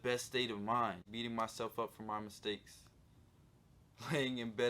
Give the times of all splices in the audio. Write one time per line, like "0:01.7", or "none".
0:01.1

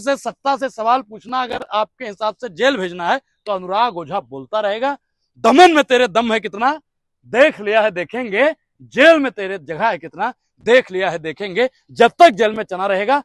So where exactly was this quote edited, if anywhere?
none

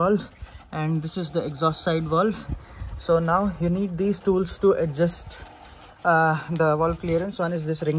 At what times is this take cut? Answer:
none

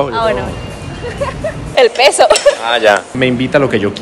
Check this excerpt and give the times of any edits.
0:01.6
0:03.2

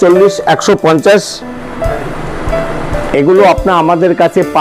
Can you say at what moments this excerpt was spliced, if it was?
none

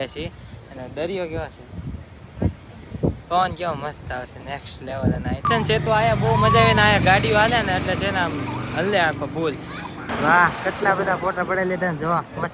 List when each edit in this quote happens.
0:05.4
0:10.1

